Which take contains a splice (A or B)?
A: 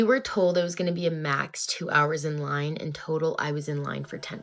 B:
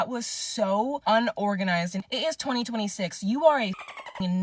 B